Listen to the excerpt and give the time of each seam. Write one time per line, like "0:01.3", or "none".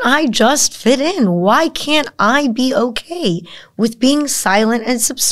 none